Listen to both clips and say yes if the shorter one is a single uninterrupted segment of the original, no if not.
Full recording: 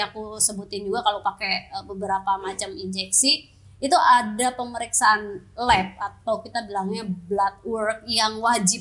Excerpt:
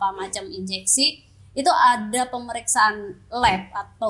yes